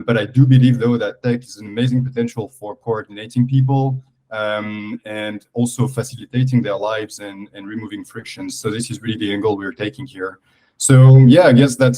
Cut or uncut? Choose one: uncut